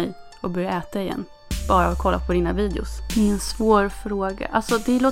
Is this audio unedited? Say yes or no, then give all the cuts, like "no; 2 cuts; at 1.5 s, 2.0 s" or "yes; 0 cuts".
no; 1 cut; at 2.9 s